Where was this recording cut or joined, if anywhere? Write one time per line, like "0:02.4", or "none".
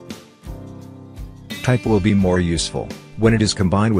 0:01.6